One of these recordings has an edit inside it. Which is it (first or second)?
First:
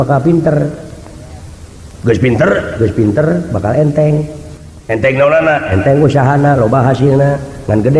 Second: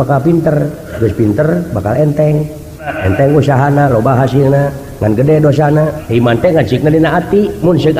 second